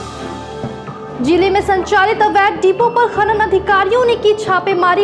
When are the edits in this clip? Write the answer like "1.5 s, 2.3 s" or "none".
0.9 s